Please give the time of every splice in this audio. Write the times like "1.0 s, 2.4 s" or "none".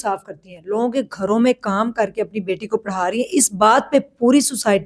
none